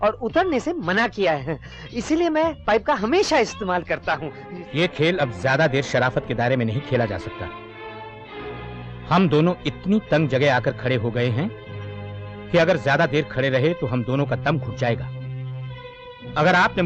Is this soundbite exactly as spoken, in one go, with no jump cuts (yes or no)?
no